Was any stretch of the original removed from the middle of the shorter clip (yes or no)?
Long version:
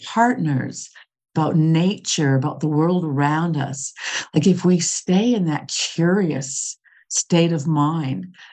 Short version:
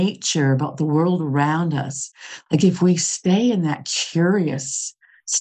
no